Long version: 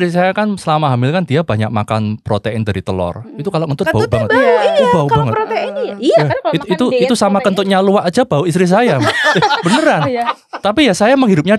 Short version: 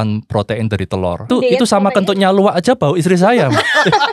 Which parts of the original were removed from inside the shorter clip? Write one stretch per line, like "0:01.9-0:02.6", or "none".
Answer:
0:03.2-0:06.8